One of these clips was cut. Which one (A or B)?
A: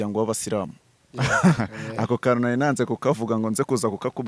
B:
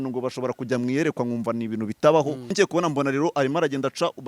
B